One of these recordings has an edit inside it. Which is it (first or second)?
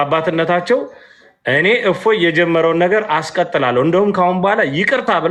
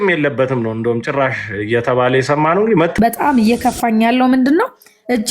second